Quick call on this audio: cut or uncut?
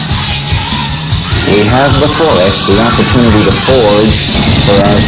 uncut